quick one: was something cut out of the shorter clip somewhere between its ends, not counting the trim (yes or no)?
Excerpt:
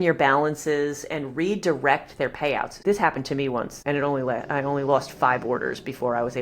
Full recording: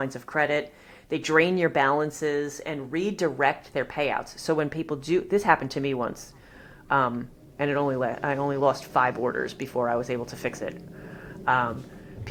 yes